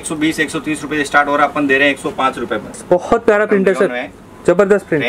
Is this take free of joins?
no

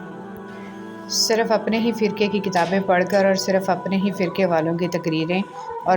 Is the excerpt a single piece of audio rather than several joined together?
no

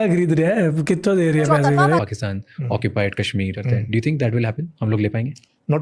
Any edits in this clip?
yes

